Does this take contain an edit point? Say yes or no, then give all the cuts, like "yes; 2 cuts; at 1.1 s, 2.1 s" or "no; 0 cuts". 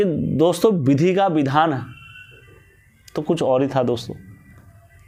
no; 0 cuts